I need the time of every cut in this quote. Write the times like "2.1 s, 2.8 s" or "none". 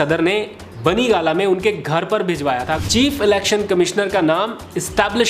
2.8 s